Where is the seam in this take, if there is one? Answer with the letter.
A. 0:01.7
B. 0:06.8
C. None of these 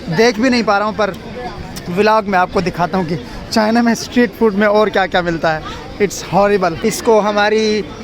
B